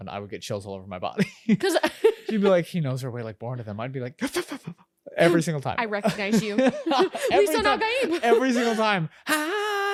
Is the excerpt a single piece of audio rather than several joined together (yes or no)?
yes